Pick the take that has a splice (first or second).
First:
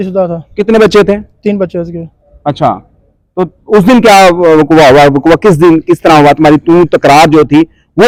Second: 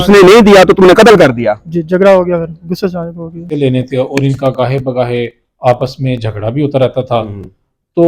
second